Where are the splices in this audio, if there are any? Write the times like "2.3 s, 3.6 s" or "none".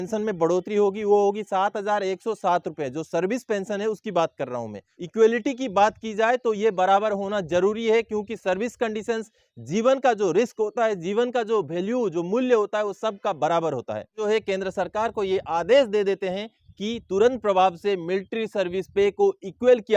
4.9 s, 14.2 s